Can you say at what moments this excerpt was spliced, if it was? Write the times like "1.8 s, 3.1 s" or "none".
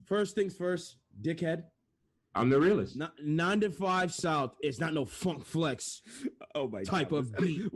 none